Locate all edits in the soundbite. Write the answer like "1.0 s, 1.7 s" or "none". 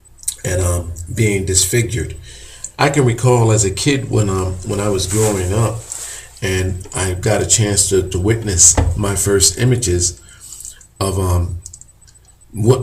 1.9 s